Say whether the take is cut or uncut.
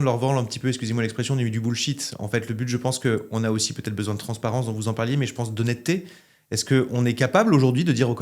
uncut